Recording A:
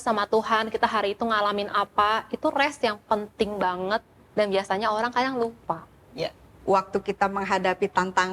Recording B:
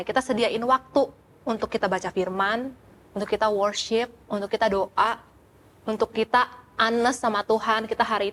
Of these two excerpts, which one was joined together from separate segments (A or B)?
A